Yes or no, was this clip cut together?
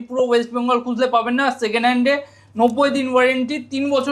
no